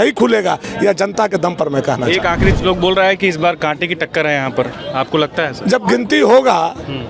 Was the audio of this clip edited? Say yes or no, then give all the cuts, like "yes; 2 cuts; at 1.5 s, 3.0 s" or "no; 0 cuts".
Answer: yes; 1 cut; at 2.5 s